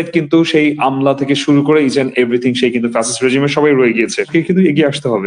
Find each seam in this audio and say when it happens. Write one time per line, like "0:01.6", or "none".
0:04.3